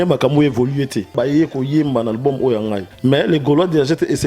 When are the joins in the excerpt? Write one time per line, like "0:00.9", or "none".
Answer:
0:01.1
0:02.9

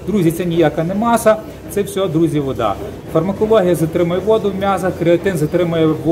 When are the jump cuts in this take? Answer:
none

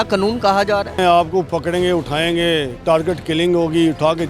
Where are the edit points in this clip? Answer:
0:01.0

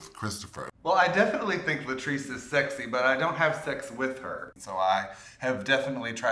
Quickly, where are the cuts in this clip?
0:00.9
0:04.5

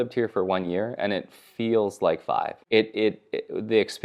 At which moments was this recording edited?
none

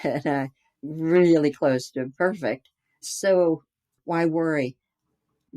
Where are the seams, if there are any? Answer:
0:03.1

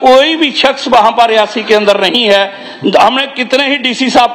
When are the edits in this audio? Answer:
none

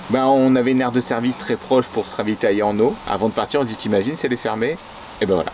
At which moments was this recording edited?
none

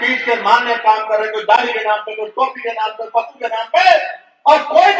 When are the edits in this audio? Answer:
none

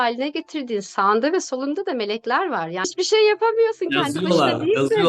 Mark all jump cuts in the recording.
0:02.9

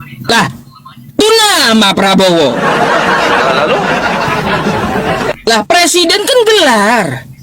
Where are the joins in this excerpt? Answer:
none

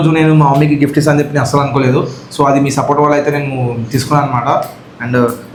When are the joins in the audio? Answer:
none

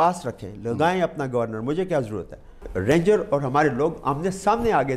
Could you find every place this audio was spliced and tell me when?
0:02.7

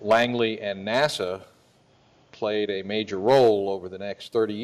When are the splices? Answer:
none

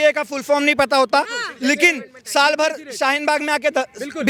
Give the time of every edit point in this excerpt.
none

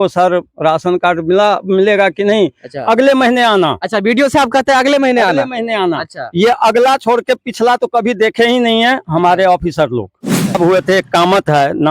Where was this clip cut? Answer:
0:10.6

